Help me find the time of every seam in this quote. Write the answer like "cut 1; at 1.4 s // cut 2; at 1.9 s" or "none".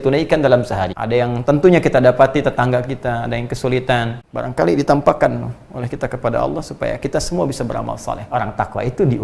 cut 1; at 0.9 s // cut 2; at 4.2 s // cut 3; at 8.3 s